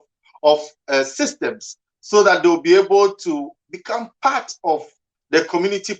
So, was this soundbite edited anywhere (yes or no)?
no